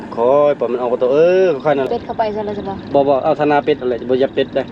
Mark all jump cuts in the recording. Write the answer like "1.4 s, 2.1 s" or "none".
1.9 s

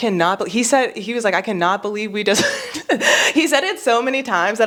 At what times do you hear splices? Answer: none

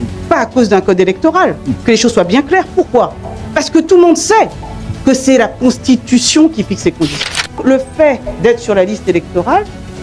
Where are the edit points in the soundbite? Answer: 7.6 s

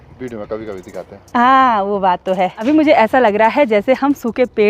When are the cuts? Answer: 2.6 s

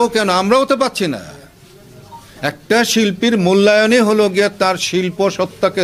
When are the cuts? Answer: none

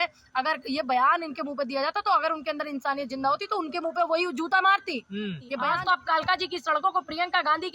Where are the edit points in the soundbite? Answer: 5.5 s

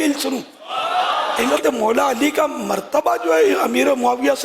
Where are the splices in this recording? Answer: 1.5 s

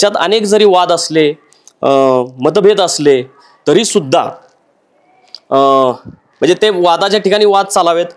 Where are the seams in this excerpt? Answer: none

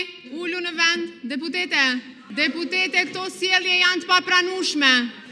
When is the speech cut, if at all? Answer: 2.2 s

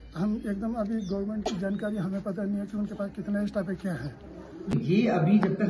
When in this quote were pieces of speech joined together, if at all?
4.7 s

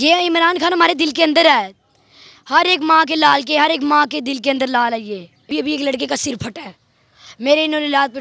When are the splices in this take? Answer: 5.5 s

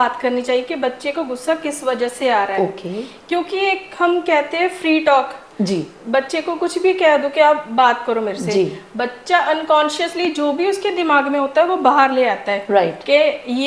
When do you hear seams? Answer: none

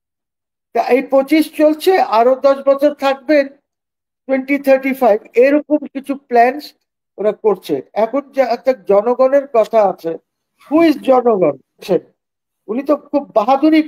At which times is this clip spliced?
11.8 s

